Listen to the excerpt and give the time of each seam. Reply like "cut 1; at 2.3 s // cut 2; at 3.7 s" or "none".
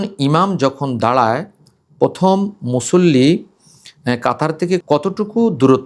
cut 1; at 4.8 s